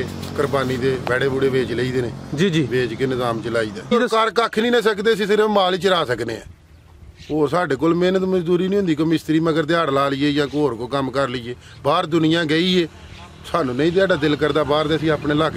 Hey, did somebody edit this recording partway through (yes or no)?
yes